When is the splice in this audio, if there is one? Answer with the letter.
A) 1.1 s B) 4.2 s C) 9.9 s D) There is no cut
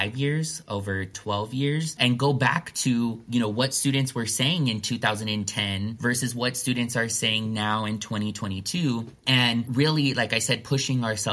A